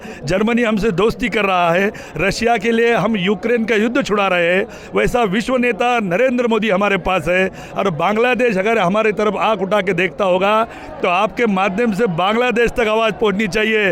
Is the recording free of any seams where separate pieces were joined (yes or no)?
yes